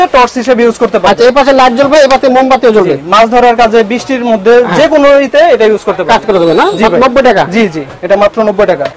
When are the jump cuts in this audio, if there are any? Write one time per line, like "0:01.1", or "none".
none